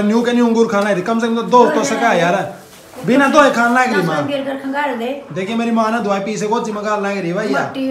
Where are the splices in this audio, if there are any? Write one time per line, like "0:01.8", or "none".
none